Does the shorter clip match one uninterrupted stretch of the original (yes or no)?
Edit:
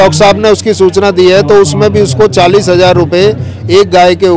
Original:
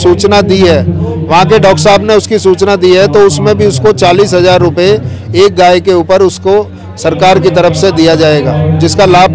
yes